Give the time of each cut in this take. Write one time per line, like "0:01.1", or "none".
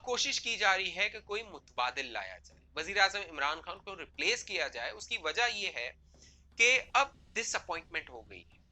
none